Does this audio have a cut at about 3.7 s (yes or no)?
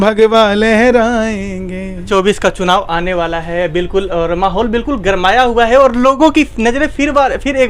no